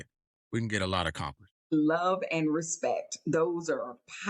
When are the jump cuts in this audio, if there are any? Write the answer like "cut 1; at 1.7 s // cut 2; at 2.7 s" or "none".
cut 1; at 1.7 s